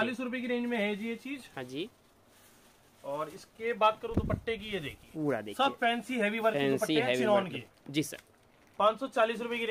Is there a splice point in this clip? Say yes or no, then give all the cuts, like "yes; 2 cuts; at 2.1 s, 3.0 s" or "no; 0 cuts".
no; 0 cuts